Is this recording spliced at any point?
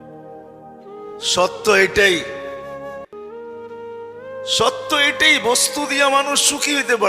yes; 2 cuts; at 2.2 s, 3.8 s

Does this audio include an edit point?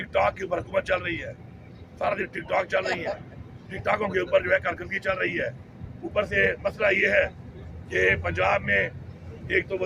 no; 0 cuts

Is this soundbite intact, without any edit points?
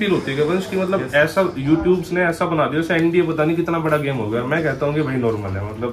yes; 0 cuts

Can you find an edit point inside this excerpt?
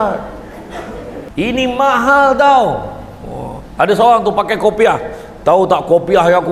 yes; 1 cut; at 1.2 s

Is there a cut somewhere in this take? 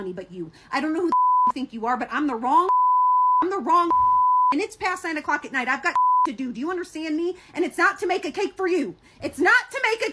no; 0 cuts

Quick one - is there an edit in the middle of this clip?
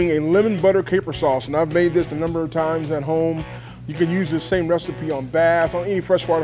no; 0 cuts

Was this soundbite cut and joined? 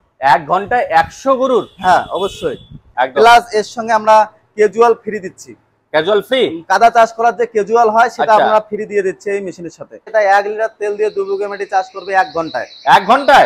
yes; 2 cuts; at 2.8 s, 10.0 s

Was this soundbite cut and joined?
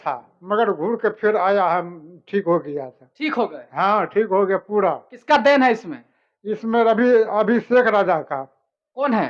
no; 0 cuts

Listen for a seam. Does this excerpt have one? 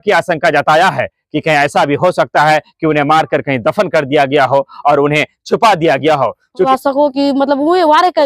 yes; 1 cut; at 6.7 s

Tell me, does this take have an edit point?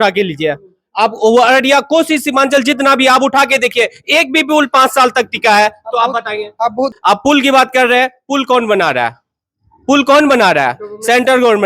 yes; 1 cut; at 7.0 s

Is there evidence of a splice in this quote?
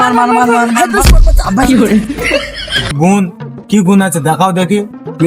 yes; 1 cut; at 2.9 s

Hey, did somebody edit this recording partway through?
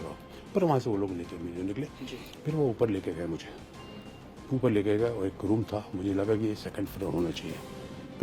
yes; 1 cut; at 2.0 s

